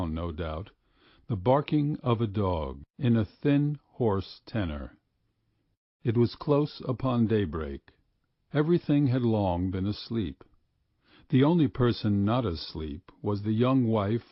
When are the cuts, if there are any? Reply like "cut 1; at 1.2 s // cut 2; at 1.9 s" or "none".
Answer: none